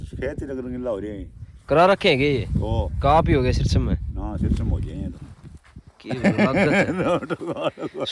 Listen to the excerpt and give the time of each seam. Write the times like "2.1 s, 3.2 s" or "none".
none